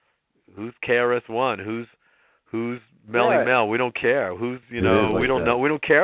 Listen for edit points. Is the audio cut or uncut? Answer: cut